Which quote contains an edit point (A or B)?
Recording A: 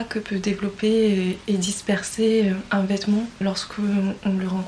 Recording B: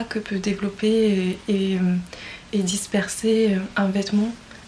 A